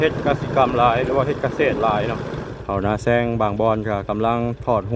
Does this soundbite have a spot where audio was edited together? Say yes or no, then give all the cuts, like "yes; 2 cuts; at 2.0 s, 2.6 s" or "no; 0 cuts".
yes; 1 cut; at 2.5 s